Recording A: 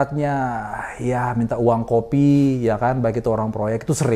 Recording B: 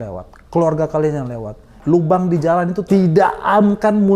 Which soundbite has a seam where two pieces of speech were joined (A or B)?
B